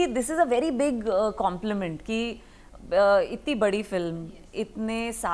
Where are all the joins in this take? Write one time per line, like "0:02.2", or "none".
none